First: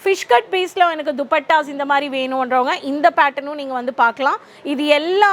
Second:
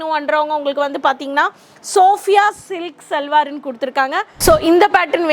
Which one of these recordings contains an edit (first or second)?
second